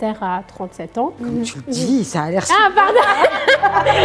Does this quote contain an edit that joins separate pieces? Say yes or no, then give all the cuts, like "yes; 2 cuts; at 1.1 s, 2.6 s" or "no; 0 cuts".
yes; 1 cut; at 1.2 s